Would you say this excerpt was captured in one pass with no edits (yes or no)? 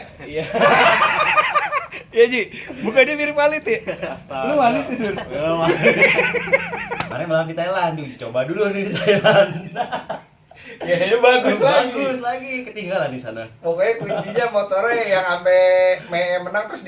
no